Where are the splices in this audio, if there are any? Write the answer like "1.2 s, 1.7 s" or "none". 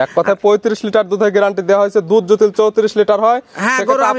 none